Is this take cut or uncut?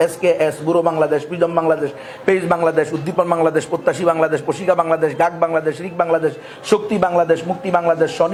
uncut